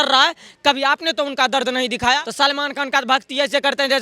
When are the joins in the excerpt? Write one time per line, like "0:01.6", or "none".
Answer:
0:02.2